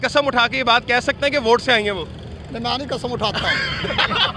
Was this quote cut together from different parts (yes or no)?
no